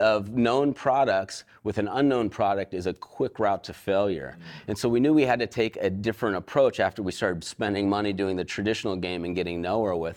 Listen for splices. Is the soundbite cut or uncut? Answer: uncut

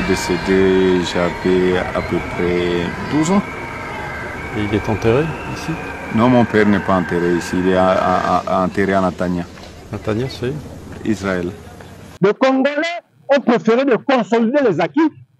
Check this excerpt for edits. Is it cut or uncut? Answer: cut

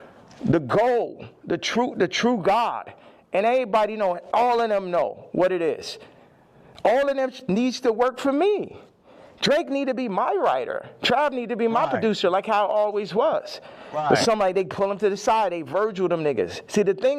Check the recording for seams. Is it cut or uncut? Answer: cut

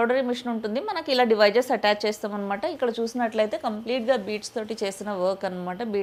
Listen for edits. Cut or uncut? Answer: uncut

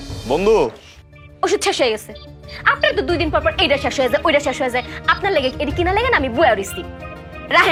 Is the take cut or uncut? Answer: uncut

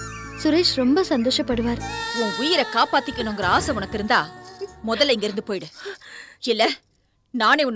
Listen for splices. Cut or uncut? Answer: cut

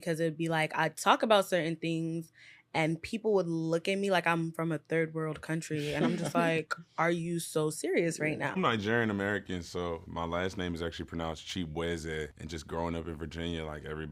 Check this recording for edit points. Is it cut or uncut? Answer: uncut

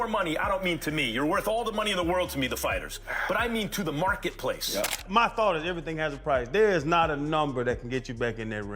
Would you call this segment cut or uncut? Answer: cut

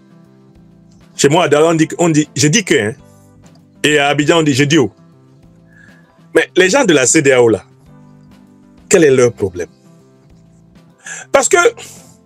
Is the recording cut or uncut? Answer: cut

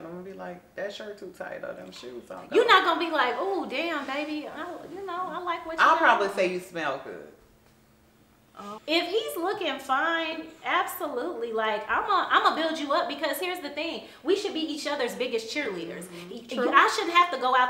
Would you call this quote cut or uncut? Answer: uncut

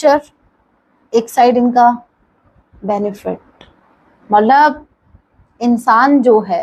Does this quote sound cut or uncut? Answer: uncut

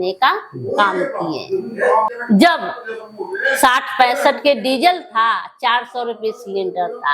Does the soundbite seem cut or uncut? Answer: cut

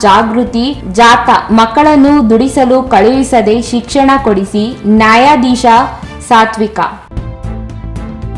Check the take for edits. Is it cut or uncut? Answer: cut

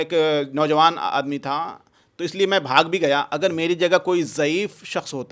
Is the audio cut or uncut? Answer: uncut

